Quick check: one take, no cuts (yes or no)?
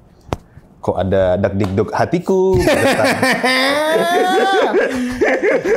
yes